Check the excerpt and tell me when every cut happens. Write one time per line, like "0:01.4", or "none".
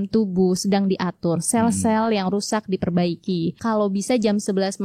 0:03.6